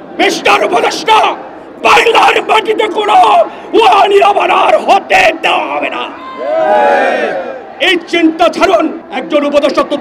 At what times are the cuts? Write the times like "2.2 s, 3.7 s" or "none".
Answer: 9.1 s